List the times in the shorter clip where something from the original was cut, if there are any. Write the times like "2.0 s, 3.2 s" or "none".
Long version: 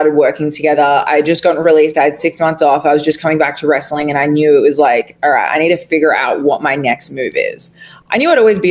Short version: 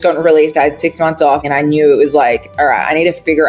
1.4 s

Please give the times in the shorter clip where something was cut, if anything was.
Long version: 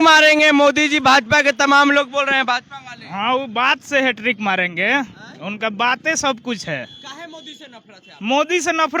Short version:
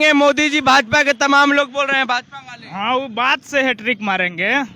none

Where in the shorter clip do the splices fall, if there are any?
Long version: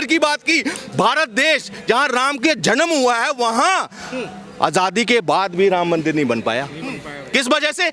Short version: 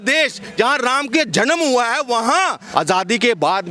2.6 s

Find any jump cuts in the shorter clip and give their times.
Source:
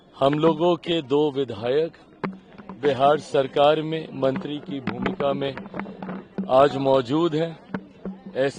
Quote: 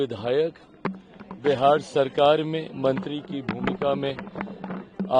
none

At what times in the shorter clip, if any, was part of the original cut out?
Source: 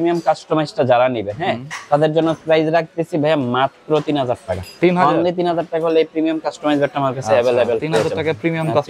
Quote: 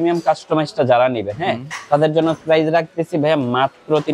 none

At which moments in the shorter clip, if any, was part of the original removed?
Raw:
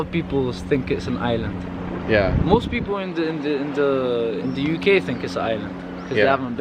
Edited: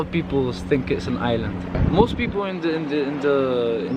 1.8 s

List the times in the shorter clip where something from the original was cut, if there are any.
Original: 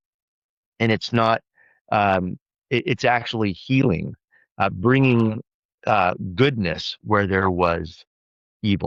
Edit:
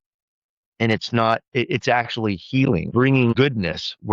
1.5 s, 3.2 s

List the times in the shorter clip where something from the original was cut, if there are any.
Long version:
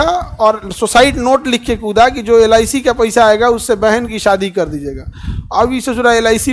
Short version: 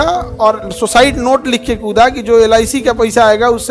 none

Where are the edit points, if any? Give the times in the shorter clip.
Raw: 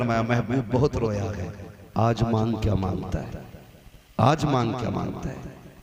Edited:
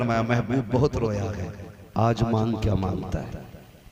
none

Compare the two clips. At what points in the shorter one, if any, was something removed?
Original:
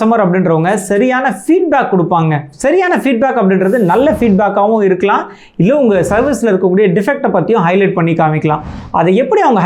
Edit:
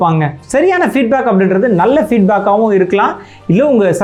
none

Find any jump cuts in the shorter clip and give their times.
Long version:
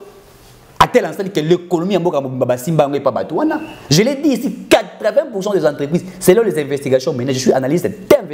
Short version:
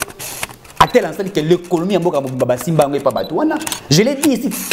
none

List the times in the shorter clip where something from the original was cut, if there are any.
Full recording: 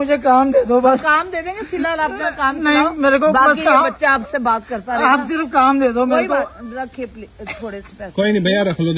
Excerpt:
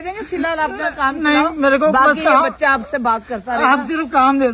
none

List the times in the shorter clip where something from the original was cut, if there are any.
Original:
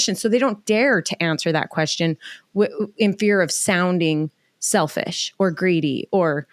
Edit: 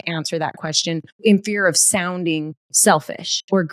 1.2 s, 2.6 s

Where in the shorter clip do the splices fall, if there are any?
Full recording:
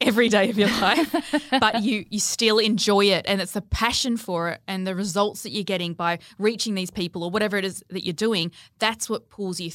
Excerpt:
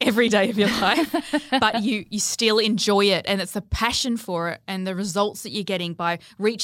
none

